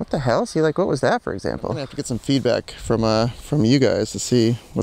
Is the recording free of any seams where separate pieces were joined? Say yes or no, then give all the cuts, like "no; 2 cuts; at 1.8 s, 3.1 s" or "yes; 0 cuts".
no; 1 cut; at 2.0 s